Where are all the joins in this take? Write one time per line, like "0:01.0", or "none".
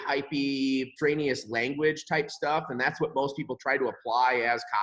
0:00.9